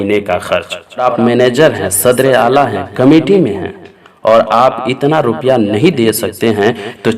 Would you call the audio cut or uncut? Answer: cut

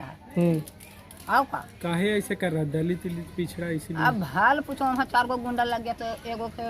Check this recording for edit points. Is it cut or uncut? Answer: uncut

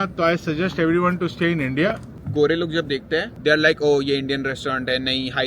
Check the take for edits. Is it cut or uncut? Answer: cut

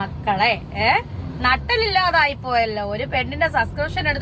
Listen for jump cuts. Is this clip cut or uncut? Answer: uncut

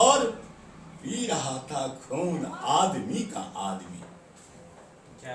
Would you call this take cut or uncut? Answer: uncut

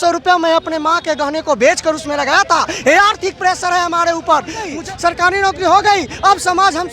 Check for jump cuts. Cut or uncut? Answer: cut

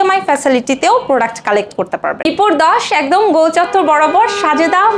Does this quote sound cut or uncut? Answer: cut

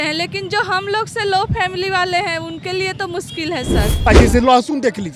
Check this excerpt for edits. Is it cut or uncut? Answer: cut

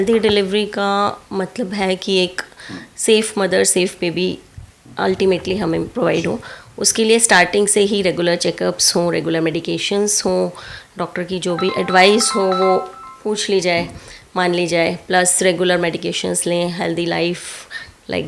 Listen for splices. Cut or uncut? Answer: uncut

